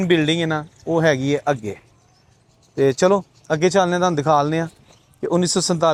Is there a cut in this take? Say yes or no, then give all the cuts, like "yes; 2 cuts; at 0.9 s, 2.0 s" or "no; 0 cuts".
no; 0 cuts